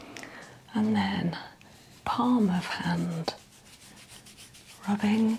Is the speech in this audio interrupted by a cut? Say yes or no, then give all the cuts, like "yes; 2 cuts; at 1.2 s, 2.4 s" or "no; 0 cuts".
no; 0 cuts